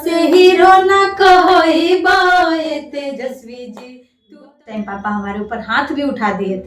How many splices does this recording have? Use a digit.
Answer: 1